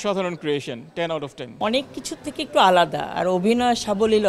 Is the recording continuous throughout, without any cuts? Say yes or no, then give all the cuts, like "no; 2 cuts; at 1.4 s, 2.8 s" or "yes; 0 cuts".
no; 1 cut; at 1.6 s